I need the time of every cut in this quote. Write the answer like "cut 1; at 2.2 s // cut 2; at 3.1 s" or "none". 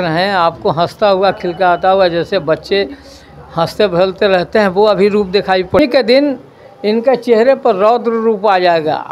cut 1; at 5.8 s